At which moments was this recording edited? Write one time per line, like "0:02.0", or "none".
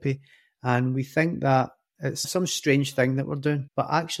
0:02.2

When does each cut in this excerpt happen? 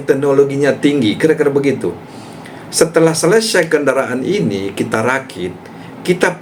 none

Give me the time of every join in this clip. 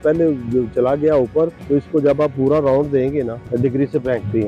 0:01.6
0:03.4

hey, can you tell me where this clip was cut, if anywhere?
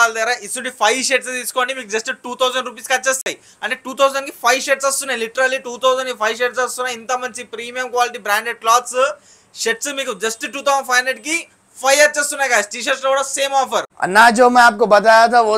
none

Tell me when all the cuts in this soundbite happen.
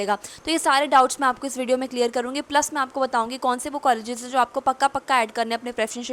none

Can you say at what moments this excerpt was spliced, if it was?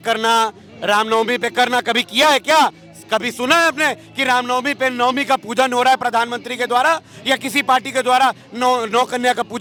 none

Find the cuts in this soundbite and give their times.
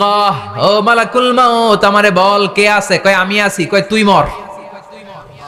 none

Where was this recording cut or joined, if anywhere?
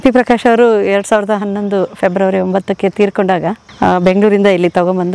0:03.6

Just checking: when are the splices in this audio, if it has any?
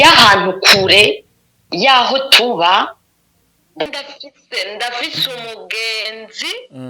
0:03.9

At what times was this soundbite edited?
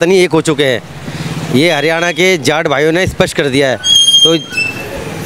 none

